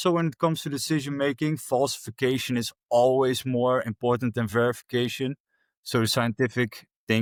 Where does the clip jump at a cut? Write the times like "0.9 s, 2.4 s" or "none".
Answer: none